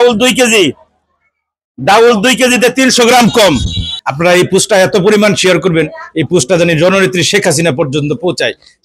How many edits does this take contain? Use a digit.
1